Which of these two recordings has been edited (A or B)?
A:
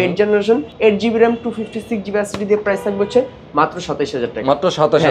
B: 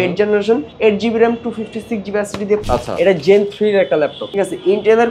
B